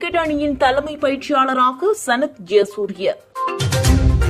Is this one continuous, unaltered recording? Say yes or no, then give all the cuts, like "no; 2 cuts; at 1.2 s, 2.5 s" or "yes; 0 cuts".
no; 1 cut; at 3.3 s